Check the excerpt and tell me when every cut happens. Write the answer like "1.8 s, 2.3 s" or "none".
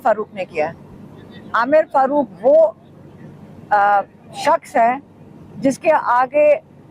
none